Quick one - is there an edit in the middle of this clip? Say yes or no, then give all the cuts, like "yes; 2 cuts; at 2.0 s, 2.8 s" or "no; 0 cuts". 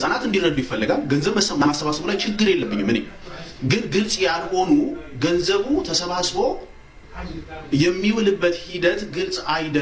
no; 0 cuts